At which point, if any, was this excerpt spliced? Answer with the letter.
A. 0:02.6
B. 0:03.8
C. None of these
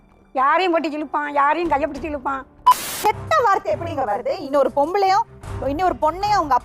A